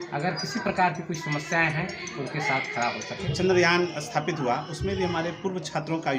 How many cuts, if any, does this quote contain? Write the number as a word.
one